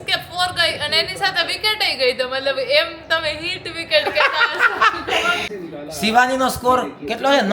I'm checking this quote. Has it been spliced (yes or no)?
yes